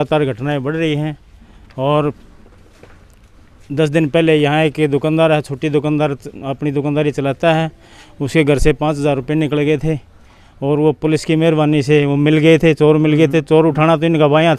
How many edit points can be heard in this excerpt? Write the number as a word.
zero